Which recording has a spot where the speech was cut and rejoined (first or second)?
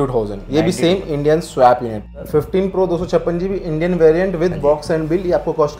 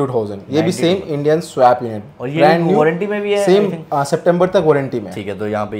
first